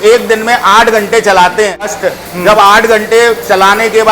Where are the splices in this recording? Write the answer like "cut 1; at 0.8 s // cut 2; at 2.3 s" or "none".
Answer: cut 1; at 1.9 s